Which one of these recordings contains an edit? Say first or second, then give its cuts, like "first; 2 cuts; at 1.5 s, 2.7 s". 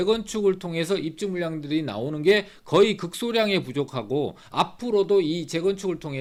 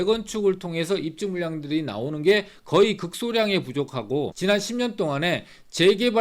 second; 1 cut; at 4.3 s